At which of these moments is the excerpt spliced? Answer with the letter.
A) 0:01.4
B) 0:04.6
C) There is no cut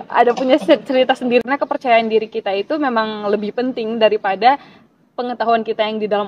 A